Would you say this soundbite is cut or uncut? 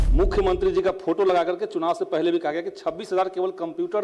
uncut